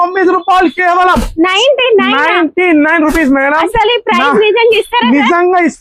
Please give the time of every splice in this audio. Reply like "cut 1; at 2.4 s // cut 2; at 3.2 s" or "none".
none